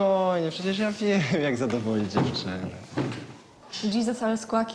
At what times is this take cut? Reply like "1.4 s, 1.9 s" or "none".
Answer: 3.5 s

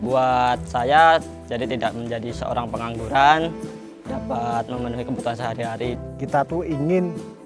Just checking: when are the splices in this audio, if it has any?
6.0 s

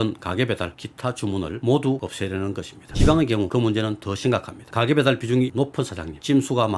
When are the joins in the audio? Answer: 2.8 s, 4.6 s

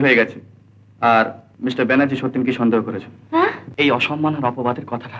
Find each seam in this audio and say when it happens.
1.4 s, 3.6 s

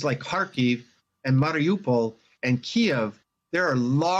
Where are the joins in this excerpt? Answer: 1.5 s

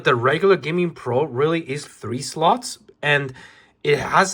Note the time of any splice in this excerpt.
1.8 s

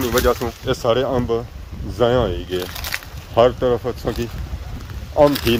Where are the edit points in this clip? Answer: none

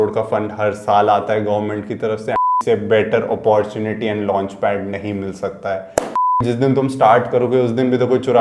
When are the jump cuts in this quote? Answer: 2.4 s, 6.2 s

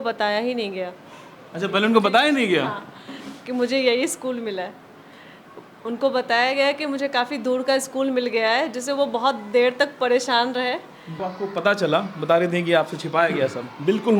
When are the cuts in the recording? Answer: 11.1 s

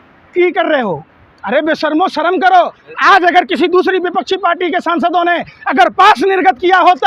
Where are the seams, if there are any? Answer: none

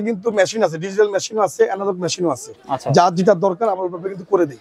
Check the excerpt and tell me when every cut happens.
none

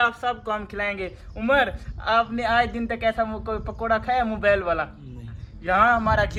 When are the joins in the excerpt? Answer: none

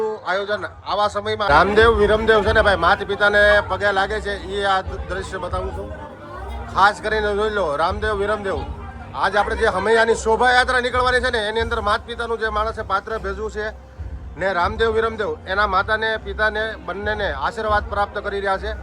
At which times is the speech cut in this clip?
1.5 s

